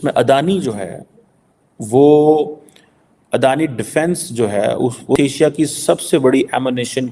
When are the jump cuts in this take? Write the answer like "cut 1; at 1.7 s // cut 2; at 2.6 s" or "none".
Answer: cut 1; at 5.2 s